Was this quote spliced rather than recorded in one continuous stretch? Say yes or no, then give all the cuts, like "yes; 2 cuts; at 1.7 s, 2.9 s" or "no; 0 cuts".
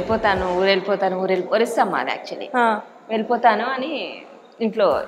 no; 0 cuts